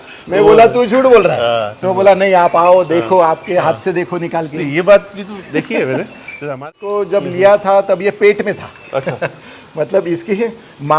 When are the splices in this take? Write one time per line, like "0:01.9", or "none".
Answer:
0:06.6